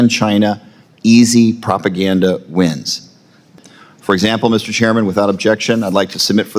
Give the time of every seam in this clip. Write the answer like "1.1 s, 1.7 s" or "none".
3.5 s